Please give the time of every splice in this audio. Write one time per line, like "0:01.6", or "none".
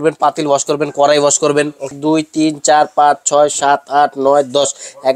0:01.9